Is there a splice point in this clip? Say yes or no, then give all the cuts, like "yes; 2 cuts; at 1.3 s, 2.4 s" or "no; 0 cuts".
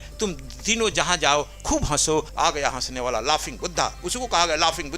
yes; 1 cut; at 2.3 s